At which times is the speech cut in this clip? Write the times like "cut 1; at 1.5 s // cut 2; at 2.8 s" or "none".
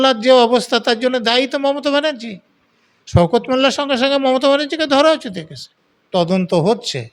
cut 1; at 6.0 s